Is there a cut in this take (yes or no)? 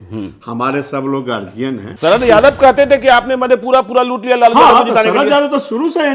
yes